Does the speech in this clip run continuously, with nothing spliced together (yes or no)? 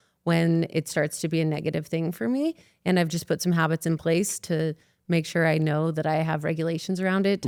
yes